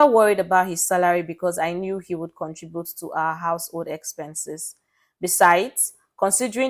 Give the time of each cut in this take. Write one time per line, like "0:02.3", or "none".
none